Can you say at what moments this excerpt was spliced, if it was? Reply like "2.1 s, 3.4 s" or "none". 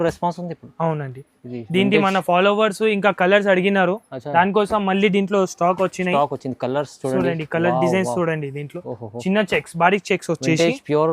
none